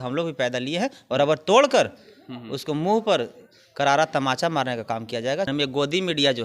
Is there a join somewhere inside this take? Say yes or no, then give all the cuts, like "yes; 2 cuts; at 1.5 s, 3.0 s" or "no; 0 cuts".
yes; 1 cut; at 5.5 s